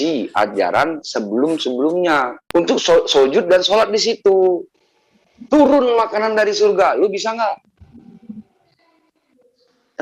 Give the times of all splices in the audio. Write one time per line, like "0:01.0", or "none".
0:02.4